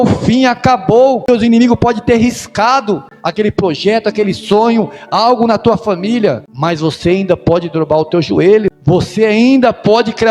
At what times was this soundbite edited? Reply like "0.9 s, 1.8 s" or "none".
1.3 s, 6.5 s, 8.7 s

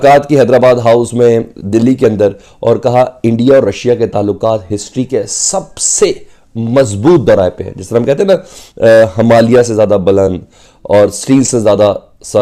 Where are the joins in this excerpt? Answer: none

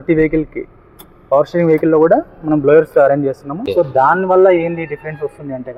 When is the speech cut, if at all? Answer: 3.5 s

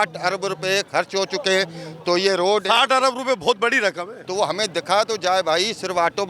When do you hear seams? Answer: none

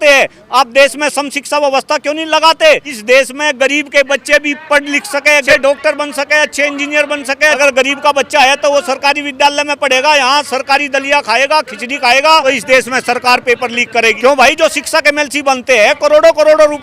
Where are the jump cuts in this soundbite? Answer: 2.9 s, 5.5 s, 7.6 s, 12.4 s, 14.2 s

